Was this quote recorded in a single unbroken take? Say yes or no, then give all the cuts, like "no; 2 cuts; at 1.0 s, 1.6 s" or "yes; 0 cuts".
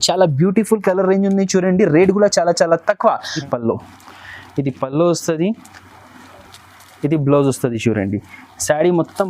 no; 1 cut; at 3.4 s